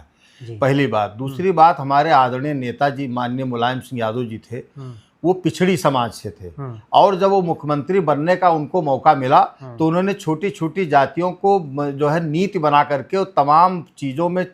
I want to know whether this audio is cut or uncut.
uncut